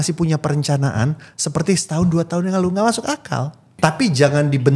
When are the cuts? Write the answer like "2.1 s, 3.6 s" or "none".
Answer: 3.6 s